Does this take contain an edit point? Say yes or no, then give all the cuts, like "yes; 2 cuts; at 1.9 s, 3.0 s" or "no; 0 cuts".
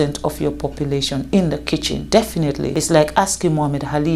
yes; 2 cuts; at 2.0 s, 2.7 s